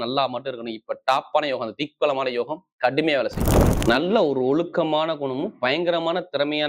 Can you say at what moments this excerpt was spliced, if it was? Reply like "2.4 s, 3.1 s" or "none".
3.7 s